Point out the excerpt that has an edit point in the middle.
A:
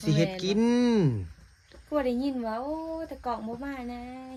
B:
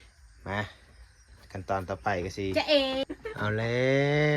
B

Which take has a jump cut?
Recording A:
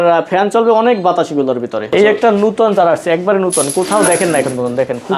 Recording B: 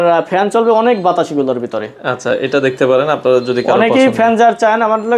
A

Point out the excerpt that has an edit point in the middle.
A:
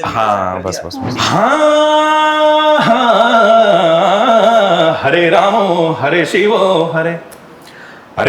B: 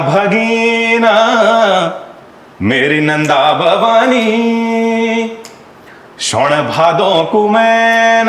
A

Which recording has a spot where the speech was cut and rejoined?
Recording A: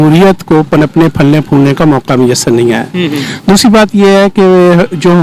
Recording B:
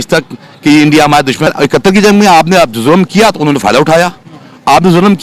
B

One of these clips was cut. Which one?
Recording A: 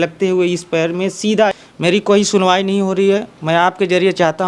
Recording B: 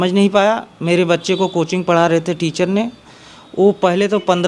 A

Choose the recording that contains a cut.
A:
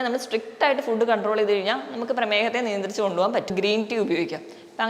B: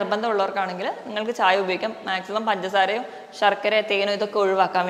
A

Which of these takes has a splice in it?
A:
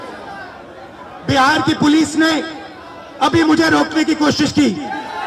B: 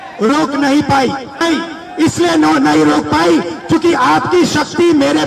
B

